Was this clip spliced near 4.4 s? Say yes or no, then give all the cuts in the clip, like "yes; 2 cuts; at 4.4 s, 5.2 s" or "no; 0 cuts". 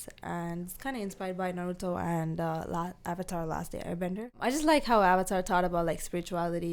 yes; 1 cut; at 4.4 s